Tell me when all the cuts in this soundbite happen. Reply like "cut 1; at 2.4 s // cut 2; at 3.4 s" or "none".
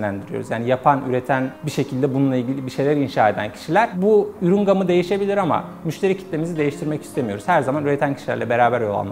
none